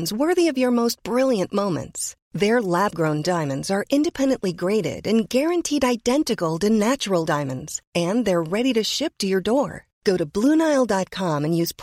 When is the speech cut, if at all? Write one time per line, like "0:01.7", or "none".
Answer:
none